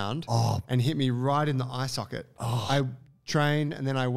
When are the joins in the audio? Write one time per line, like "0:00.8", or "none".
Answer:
0:02.5